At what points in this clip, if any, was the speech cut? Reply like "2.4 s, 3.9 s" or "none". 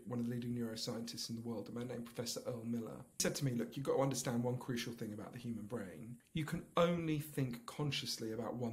3.2 s, 6.1 s